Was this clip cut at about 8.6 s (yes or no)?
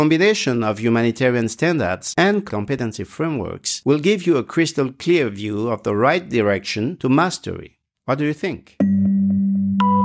yes